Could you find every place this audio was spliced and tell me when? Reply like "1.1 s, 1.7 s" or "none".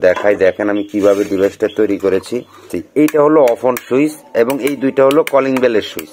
2.7 s